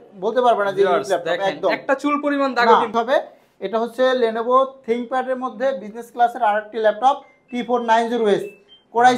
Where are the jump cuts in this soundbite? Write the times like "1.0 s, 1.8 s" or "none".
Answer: 2.9 s

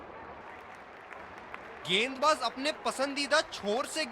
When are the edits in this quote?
1.9 s

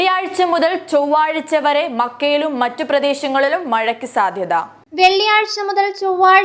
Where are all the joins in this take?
none

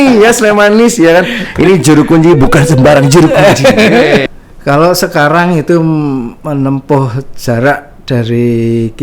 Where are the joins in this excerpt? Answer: 4.2 s

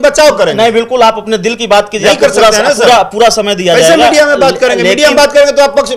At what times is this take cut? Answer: none

